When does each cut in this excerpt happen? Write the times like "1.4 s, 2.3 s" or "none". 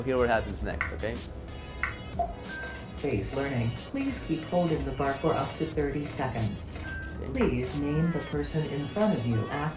none